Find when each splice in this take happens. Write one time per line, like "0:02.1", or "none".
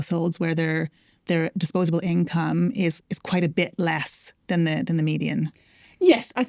none